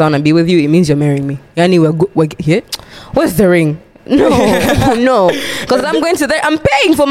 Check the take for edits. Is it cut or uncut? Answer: uncut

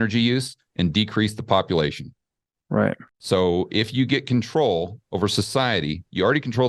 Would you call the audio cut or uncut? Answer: cut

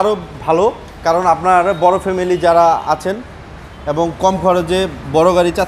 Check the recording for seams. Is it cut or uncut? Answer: uncut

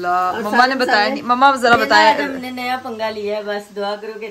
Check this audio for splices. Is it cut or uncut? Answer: uncut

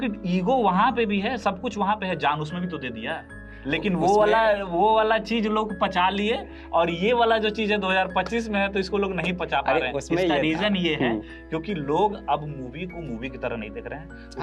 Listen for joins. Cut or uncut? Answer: uncut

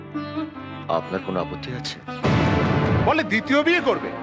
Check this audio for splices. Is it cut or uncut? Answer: cut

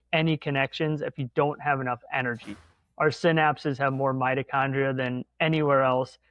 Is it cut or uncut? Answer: uncut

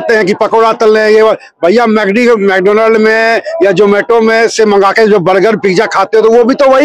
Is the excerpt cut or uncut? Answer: uncut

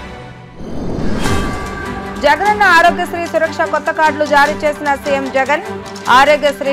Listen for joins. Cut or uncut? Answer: uncut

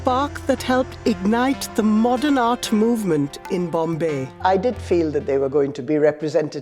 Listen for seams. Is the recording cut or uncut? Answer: cut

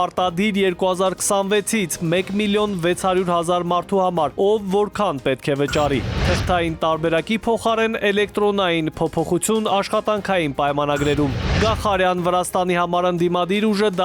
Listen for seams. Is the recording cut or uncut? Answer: uncut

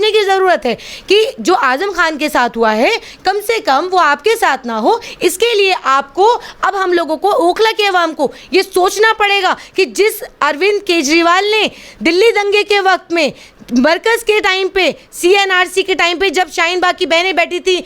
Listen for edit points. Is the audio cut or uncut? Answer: uncut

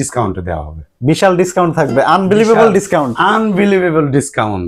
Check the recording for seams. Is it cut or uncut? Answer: uncut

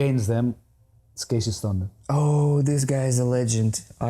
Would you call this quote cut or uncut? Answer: uncut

